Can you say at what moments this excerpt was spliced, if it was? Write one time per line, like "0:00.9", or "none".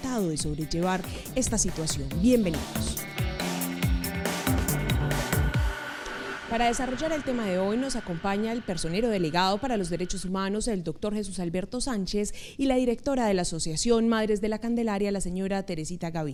none